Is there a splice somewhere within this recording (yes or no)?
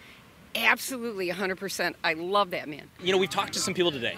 no